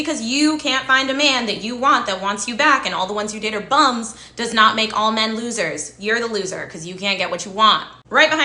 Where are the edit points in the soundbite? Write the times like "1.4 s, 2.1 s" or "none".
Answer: 5.9 s